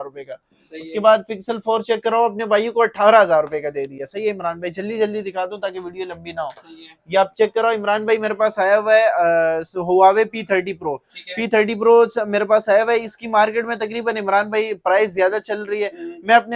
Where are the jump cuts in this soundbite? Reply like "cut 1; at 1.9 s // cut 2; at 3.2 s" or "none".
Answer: none